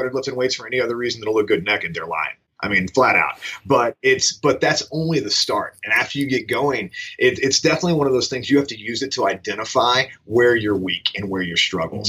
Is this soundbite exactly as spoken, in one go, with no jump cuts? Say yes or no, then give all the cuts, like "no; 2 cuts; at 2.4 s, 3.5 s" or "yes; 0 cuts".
yes; 0 cuts